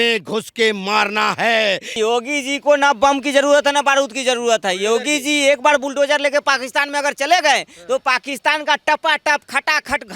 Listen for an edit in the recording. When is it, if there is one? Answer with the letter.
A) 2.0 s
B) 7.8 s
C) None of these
A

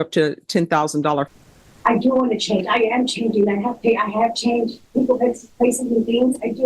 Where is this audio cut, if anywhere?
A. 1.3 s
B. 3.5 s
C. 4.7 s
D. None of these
A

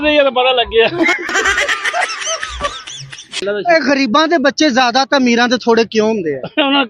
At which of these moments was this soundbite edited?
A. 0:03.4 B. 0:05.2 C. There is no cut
A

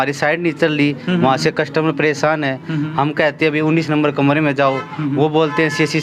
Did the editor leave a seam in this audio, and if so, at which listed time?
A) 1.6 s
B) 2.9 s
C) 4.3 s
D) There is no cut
D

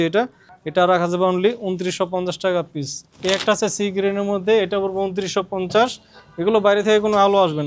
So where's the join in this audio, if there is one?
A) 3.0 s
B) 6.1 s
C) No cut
A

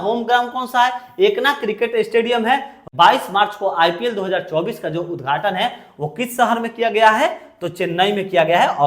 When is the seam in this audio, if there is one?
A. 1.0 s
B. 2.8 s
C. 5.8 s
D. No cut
B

